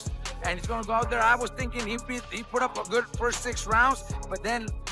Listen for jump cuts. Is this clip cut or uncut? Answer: uncut